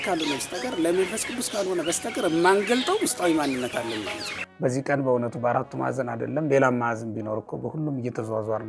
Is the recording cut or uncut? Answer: cut